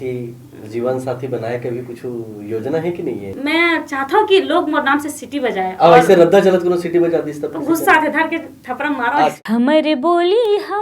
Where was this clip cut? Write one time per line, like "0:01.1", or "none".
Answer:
0:03.3
0:09.3